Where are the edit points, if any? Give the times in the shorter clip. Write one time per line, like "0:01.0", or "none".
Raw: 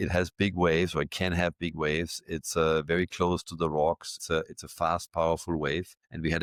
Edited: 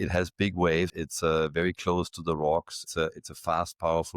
0:00.9